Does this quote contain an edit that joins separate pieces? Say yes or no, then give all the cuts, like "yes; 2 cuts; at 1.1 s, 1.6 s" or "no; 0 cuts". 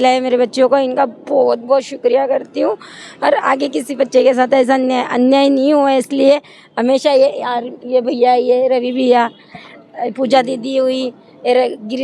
no; 0 cuts